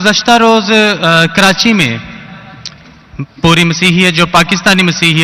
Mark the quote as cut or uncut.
uncut